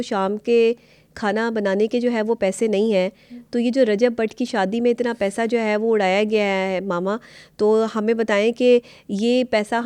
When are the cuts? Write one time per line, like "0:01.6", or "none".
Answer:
none